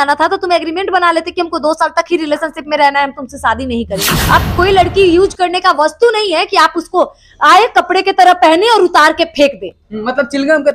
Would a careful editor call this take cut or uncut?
cut